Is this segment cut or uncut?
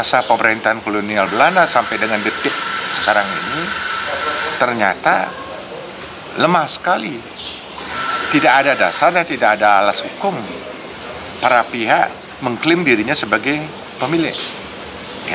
uncut